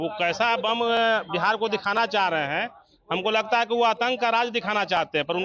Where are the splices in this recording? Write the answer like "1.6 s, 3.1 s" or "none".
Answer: none

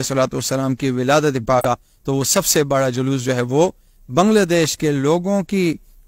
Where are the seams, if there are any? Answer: 1.6 s

